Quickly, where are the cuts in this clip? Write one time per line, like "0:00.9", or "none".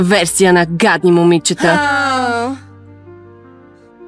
0:02.6